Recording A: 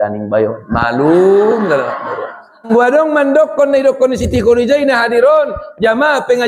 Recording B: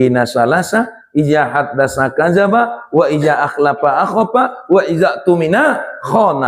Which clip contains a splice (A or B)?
A